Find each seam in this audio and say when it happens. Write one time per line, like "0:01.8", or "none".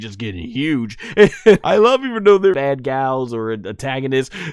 0:01.6
0:02.6

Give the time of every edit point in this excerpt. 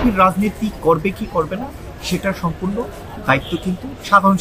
none

